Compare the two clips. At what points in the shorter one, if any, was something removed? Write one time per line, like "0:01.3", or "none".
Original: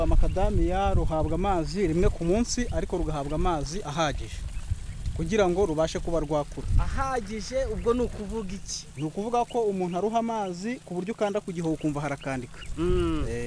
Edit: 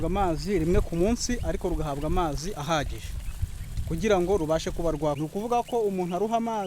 0:05.2